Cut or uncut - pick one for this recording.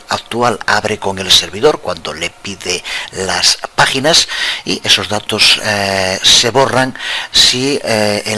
uncut